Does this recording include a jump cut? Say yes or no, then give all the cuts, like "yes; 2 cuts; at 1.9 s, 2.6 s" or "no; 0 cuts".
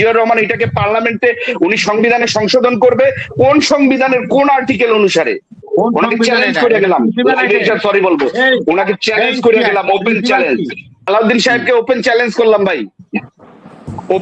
yes; 1 cut; at 11.1 s